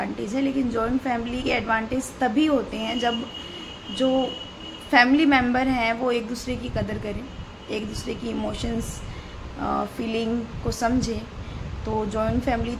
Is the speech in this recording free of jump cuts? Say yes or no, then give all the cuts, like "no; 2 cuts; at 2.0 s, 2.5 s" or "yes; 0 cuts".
yes; 0 cuts